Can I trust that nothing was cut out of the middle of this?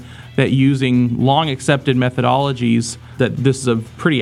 yes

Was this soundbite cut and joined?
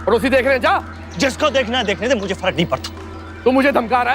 yes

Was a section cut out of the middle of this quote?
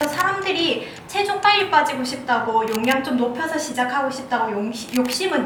no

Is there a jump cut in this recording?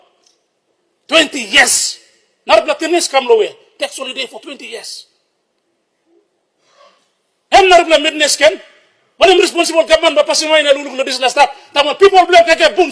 no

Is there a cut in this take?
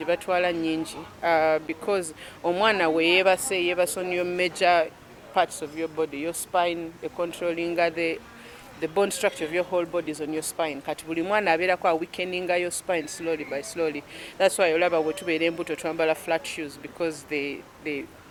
no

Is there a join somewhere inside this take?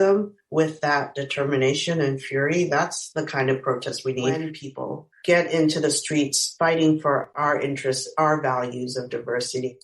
yes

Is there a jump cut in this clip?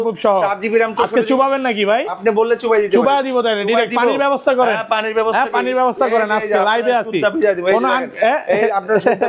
no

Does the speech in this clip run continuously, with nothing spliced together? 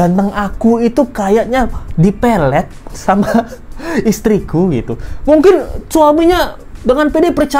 yes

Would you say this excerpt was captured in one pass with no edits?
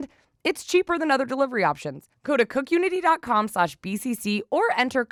yes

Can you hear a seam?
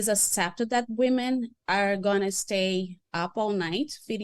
yes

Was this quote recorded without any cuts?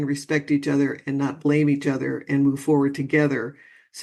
yes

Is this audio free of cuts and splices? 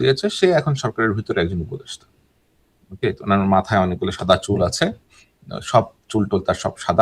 yes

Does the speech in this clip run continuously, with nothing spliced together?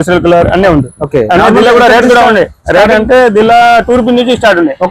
yes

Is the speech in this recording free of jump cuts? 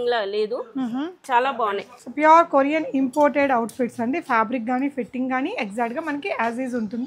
no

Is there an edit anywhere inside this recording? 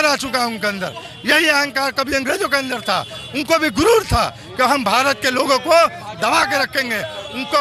no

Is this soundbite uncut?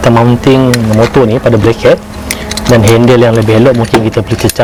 yes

